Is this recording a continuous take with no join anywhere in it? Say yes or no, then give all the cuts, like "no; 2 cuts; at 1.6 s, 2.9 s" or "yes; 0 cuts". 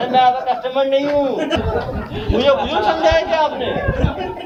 yes; 0 cuts